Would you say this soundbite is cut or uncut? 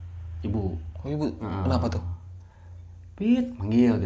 uncut